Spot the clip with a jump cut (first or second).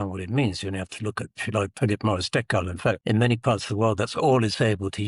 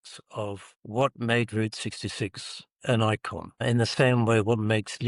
first